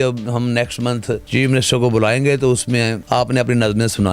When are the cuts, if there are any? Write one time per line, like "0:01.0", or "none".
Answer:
0:01.2
0:03.0